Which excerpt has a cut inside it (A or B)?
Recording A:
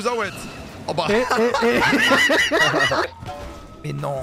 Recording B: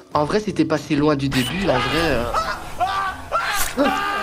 A